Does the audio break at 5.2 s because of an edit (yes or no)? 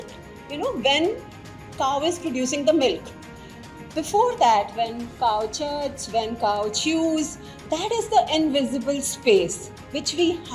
no